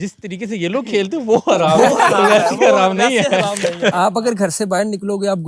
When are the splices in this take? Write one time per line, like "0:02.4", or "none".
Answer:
0:03.9

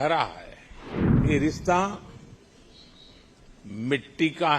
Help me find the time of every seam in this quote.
0:01.2

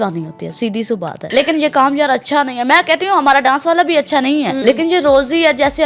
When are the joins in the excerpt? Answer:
0:01.2
0:04.6

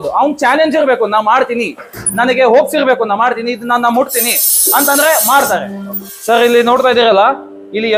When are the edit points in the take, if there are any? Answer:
0:06.1

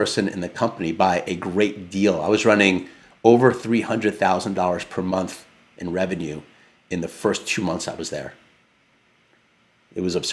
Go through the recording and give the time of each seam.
none

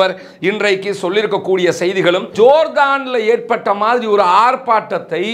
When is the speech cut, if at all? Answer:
0:02.3

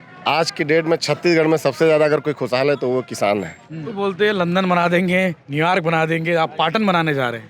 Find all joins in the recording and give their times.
0:03.9

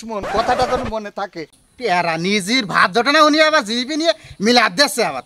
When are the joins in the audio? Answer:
0:01.6

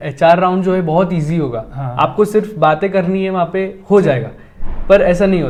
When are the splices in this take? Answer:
none

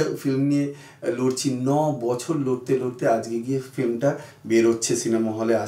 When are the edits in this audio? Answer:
none

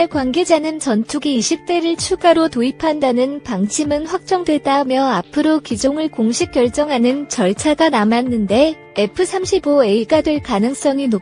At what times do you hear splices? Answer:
none

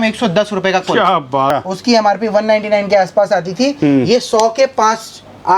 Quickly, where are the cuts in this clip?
0:01.5

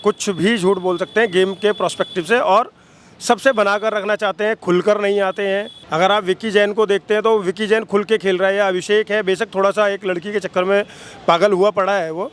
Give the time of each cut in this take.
0:05.8

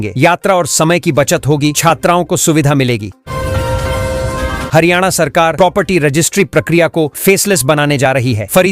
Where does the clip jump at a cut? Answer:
0:03.2
0:04.7

